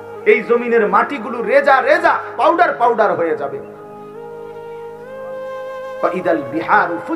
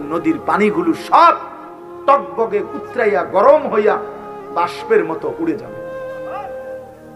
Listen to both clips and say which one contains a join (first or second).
first